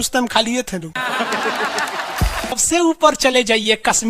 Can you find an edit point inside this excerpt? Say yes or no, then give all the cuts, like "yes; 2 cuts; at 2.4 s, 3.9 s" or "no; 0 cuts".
yes; 1 cut; at 2.6 s